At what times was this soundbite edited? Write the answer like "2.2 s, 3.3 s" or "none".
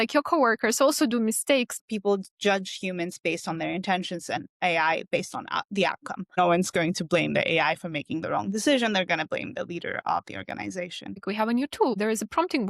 1.7 s, 6.4 s, 11.2 s